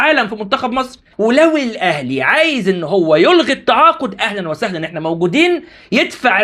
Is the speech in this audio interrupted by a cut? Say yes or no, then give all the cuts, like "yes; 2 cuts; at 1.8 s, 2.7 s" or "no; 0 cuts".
yes; 1 cut; at 1.0 s